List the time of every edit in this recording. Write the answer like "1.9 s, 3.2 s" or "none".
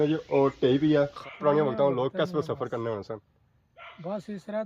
1.2 s